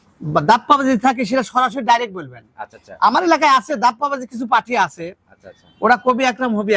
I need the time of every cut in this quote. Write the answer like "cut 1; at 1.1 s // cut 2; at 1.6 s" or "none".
none

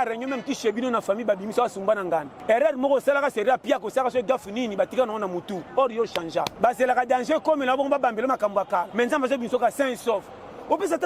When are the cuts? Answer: cut 1; at 2.3 s // cut 2; at 6.5 s // cut 3; at 8.9 s

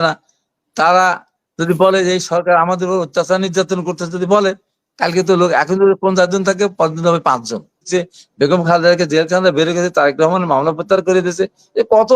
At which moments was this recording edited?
cut 1; at 7.9 s

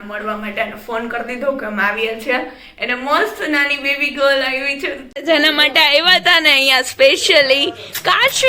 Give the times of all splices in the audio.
cut 1; at 5.2 s

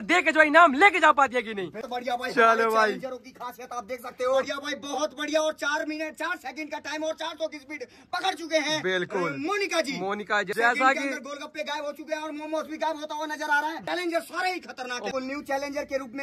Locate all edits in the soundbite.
cut 1; at 1.8 s // cut 2; at 4.6 s // cut 3; at 10.5 s // cut 4; at 13.8 s // cut 5; at 15.1 s

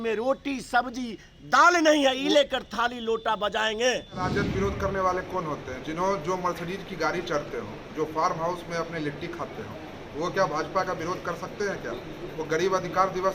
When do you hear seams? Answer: cut 1; at 4.3 s

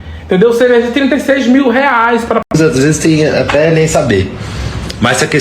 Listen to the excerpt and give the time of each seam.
cut 1; at 2.5 s

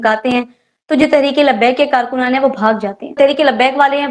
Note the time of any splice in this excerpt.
cut 1; at 3.1 s

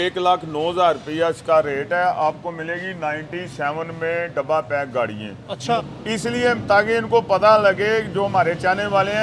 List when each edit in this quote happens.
cut 1; at 5.8 s

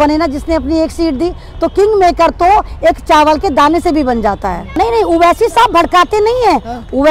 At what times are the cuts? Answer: none

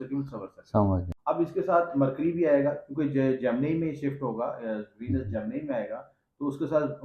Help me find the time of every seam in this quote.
cut 1; at 1.1 s

